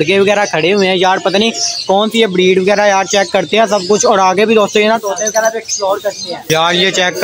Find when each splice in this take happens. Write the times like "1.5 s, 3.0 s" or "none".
none